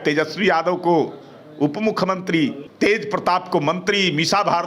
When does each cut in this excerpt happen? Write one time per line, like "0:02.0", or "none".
0:02.6